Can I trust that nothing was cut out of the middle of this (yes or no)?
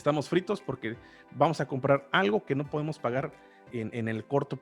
no